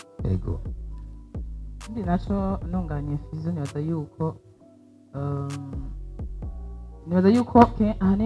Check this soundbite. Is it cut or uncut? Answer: uncut